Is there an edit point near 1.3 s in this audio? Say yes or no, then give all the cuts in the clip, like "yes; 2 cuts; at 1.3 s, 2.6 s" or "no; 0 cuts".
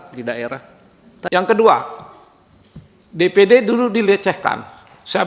yes; 1 cut; at 1.3 s